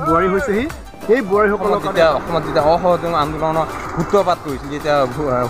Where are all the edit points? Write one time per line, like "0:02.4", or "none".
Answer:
0:01.8